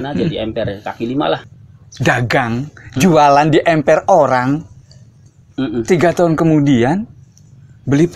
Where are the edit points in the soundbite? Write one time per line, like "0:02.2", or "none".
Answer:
0:01.5